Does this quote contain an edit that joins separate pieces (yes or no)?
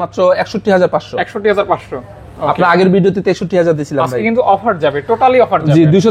no